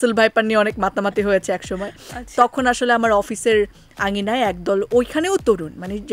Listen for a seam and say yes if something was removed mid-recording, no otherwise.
no